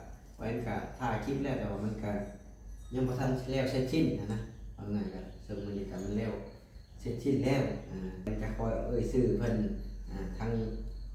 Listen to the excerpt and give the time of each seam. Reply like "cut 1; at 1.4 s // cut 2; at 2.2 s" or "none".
cut 1; at 8.3 s